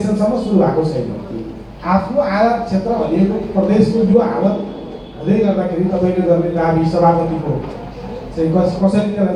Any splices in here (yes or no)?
no